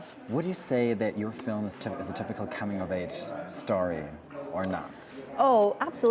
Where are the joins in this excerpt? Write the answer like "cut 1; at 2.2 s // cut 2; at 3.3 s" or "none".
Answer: cut 1; at 2.6 s